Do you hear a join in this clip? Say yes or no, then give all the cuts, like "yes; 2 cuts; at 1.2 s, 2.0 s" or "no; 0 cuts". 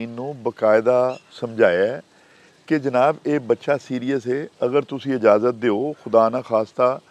no; 0 cuts